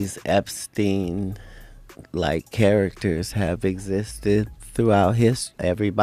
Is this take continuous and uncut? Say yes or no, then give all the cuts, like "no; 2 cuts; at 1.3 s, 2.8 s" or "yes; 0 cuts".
yes; 0 cuts